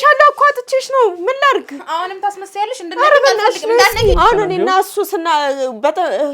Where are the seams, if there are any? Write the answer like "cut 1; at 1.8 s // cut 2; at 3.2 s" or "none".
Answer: cut 1; at 4.2 s